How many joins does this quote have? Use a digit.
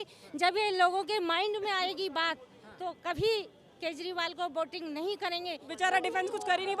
1